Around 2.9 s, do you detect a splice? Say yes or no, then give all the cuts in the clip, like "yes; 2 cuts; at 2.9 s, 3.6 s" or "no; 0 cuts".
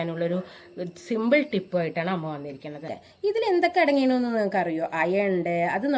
yes; 1 cut; at 2.9 s